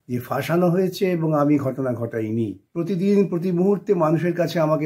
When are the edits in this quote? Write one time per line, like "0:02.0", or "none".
0:02.6